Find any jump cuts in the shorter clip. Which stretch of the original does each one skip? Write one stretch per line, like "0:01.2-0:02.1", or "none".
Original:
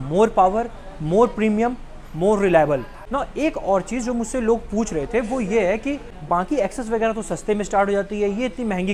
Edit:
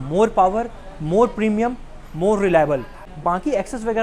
0:03.0-0:06.1

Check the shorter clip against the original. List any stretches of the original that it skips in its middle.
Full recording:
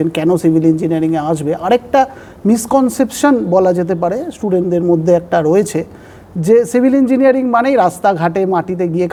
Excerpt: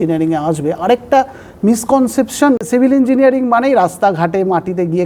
0:03.5-0:06.7

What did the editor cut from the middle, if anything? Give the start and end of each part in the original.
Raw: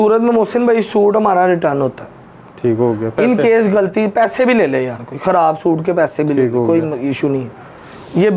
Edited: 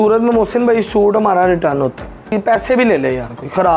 0:02.3-0:04.0

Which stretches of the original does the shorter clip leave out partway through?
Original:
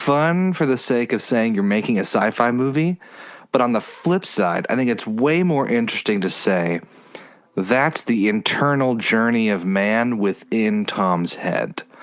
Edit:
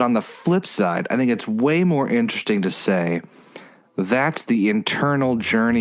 none

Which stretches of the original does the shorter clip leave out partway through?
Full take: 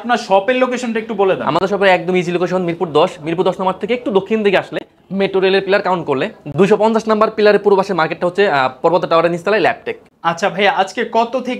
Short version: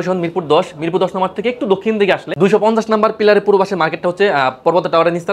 0:04.7-0:06.5

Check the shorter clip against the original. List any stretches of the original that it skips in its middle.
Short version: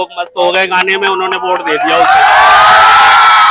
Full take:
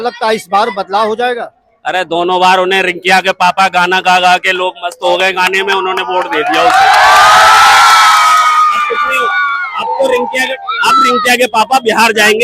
none

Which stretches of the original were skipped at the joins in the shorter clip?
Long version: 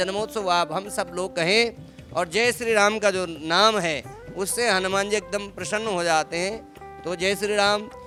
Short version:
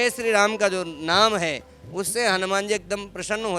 none

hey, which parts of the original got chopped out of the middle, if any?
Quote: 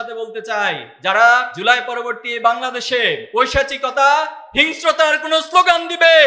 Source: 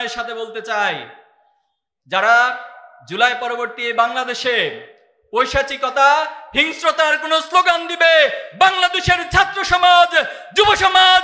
0:01.1-0:02.0
0:02.6-0:03.1
0:04.8-0:05.2

